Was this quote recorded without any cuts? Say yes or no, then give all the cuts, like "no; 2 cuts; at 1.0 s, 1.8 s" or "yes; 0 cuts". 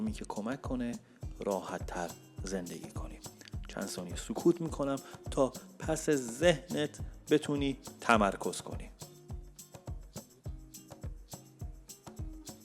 no; 1 cut; at 8.9 s